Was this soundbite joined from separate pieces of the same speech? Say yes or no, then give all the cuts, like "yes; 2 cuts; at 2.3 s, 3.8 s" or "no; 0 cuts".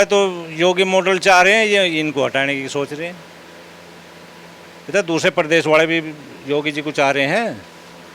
no; 0 cuts